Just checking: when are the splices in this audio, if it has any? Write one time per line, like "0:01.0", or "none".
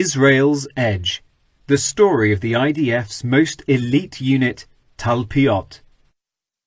none

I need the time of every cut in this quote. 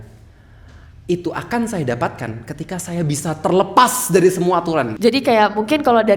0:04.9

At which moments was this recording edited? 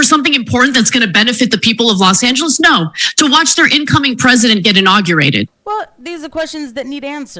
0:05.6

